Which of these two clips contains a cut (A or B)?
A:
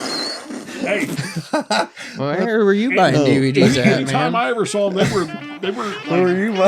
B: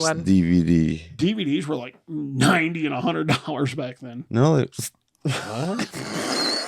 B